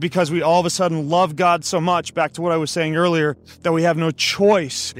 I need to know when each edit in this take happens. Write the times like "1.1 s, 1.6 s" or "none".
none